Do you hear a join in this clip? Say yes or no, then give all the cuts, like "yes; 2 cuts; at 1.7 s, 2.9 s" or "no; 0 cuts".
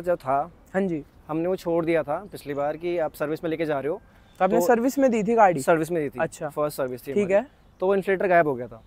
no; 0 cuts